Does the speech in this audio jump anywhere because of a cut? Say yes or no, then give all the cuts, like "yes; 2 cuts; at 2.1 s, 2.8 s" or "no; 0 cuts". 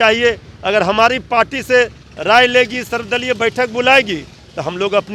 no; 0 cuts